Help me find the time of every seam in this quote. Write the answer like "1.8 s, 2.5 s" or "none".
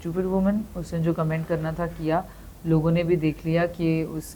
none

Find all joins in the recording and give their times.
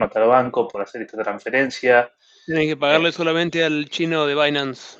none

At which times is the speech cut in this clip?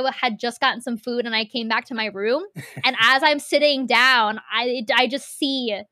none

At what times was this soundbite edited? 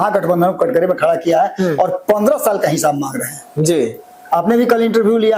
none

